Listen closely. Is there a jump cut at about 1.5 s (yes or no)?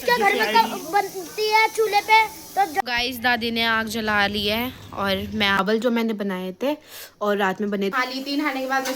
no